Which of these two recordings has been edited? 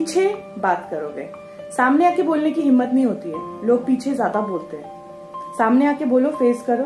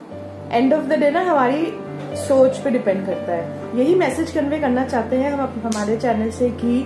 second; 1 cut; at 3.6 s

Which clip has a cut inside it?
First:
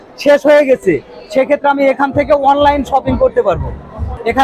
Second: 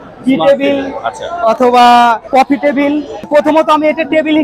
second; 2 cuts; at 2.2 s, 3.3 s

